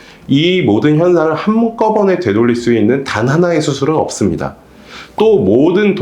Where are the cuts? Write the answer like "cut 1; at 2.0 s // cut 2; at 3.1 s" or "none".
none